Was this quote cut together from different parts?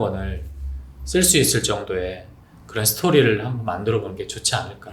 no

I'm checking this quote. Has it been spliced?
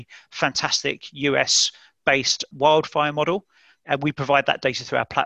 yes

